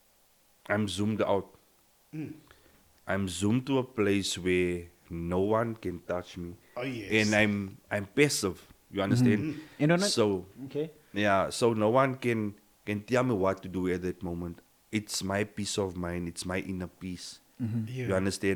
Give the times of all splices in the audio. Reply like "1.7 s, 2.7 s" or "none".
none